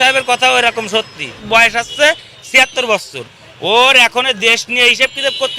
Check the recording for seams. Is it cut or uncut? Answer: cut